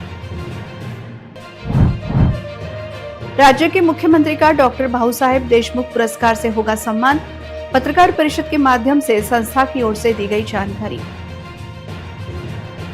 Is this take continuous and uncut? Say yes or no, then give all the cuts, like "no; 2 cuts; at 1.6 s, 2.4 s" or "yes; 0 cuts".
no; 1 cut; at 1.2 s